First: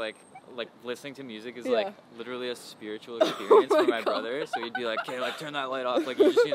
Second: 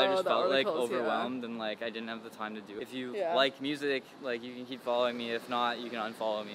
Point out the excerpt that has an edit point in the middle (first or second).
second